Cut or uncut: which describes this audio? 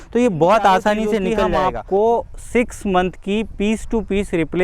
cut